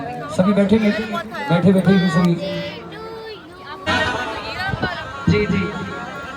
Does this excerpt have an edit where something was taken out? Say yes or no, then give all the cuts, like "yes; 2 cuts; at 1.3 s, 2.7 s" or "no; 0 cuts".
yes; 1 cut; at 3.9 s